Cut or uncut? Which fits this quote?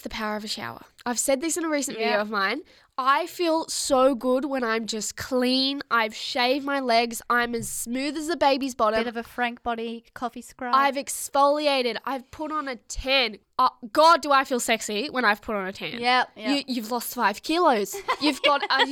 uncut